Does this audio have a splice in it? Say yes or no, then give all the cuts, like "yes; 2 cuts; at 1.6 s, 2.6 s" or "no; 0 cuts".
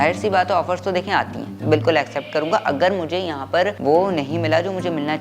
yes; 1 cut; at 1.5 s